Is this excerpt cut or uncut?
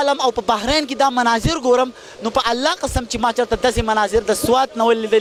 uncut